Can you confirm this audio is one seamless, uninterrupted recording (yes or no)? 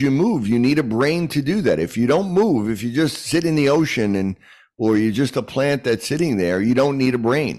yes